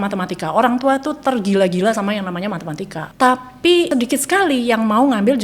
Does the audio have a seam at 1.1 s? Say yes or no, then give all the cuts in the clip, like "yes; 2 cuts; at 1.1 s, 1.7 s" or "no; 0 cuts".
no; 2 cuts; at 3.1 s, 3.9 s